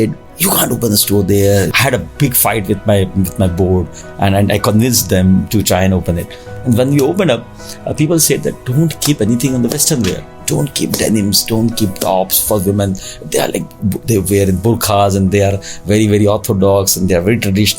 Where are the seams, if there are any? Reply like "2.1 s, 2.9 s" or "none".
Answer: 1.7 s